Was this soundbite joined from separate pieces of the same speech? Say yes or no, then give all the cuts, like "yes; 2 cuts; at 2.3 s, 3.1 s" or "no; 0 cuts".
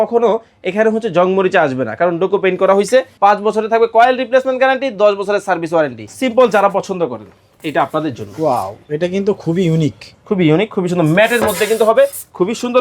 yes; 2 cuts; at 3.1 s, 6.0 s